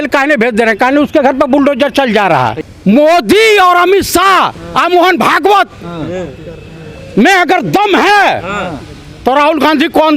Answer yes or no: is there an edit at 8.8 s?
no